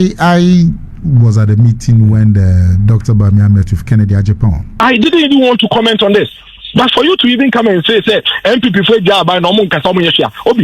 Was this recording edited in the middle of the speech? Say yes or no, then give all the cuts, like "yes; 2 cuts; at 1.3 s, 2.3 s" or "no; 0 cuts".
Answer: yes; 1 cut; at 4.8 s